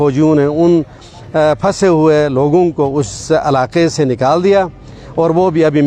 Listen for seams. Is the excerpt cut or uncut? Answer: uncut